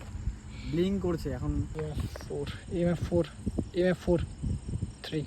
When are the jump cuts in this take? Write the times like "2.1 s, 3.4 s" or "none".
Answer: 1.7 s